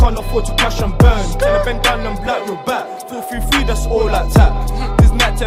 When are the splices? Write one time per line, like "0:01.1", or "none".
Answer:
none